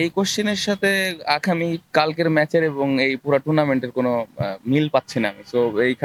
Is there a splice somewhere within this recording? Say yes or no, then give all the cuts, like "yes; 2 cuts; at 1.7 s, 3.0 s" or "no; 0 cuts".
no; 0 cuts